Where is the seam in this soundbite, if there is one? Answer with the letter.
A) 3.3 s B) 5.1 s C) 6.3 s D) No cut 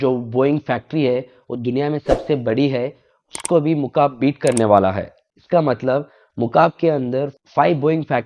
D